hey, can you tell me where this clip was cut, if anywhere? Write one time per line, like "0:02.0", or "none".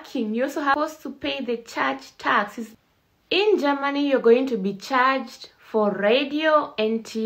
0:00.7
0:02.6